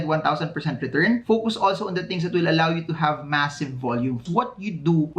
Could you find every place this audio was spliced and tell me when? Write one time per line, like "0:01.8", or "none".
0:04.2